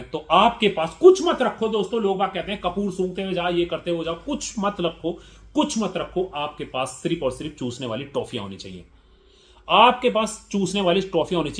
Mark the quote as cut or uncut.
uncut